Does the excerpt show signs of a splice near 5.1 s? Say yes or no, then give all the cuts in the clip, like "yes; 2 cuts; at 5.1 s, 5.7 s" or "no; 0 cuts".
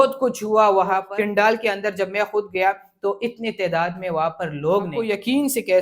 yes; 2 cuts; at 1.1 s, 5.1 s